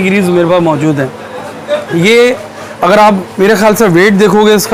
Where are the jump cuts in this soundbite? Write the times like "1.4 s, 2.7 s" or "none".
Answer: none